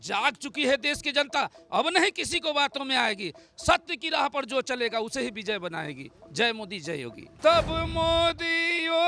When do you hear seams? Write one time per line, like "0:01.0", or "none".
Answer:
0:07.3